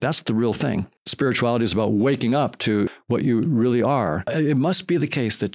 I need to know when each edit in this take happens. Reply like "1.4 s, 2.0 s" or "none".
1.0 s, 2.9 s, 4.2 s